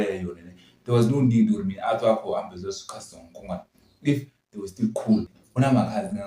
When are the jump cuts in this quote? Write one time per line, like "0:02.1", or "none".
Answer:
0:05.1